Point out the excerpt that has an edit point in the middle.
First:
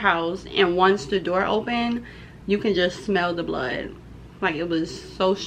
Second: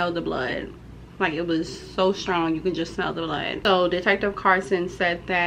second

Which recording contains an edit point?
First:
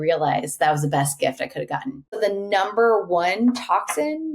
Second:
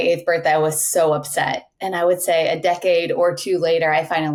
first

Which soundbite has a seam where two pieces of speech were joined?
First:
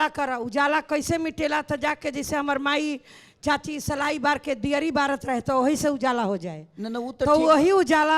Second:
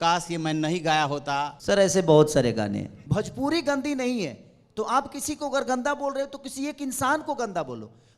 second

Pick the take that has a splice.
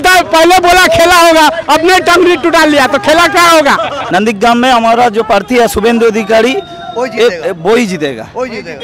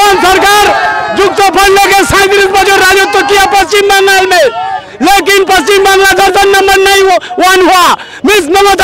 first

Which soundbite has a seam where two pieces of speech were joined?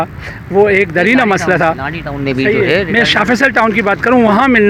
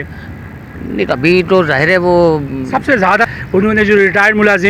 second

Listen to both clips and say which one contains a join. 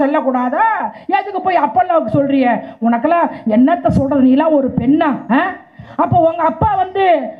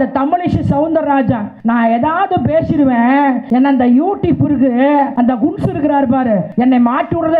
second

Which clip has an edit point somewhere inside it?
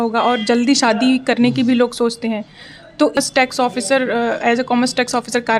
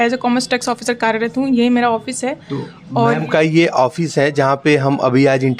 first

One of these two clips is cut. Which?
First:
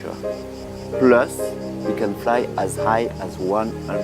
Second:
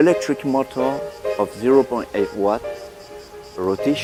first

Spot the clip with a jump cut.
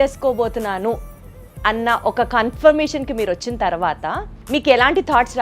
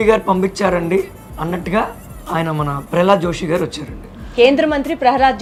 first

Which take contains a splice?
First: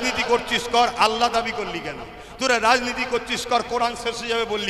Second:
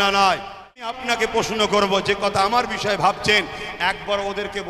second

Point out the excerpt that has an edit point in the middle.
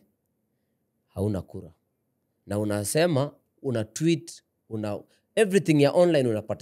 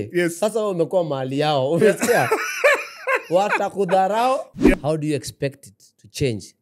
second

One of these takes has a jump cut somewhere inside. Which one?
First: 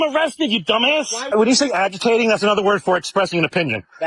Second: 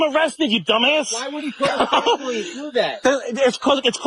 first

